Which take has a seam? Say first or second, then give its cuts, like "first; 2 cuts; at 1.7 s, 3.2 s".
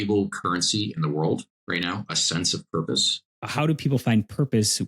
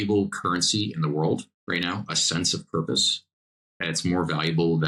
first; 1 cut; at 3.4 s